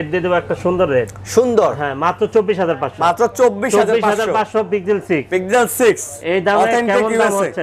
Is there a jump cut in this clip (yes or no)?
no